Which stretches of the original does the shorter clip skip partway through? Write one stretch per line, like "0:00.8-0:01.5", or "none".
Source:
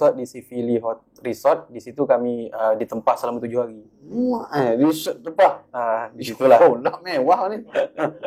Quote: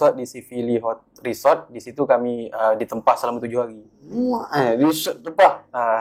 none